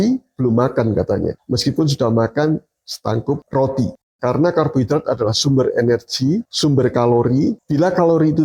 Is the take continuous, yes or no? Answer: no